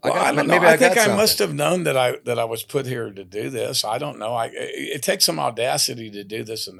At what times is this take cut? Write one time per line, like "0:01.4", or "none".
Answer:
none